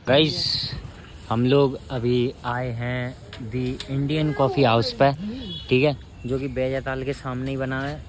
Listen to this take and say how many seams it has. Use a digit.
0